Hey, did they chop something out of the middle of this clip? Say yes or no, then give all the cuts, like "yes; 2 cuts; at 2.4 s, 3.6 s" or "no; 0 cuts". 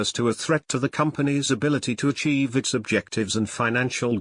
yes; 1 cut; at 2.1 s